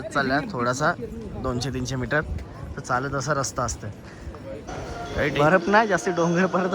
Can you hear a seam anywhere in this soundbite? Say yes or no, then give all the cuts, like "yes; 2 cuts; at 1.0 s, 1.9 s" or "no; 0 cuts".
yes; 1 cut; at 5.4 s